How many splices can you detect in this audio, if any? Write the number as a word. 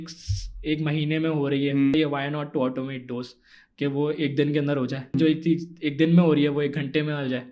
two